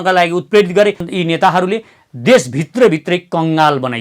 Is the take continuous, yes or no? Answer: no